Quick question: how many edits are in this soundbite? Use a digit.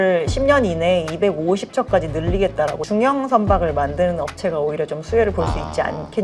1